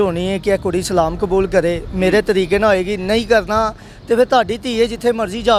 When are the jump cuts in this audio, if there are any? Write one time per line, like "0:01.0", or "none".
none